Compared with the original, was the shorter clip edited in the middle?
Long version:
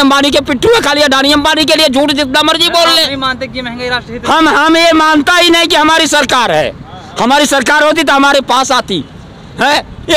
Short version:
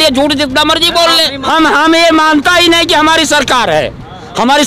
yes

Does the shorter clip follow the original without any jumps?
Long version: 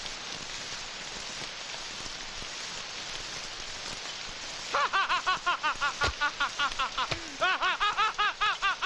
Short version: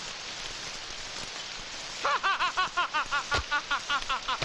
yes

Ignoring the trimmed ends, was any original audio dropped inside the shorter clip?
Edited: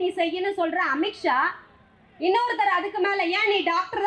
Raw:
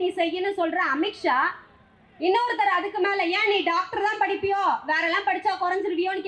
no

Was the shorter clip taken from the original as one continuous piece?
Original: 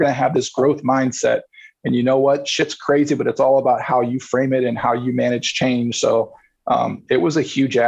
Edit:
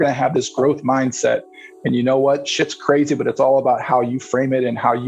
yes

